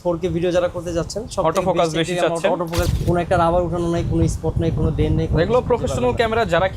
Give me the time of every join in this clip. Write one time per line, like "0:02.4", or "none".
0:02.9